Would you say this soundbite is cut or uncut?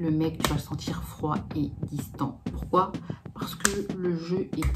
uncut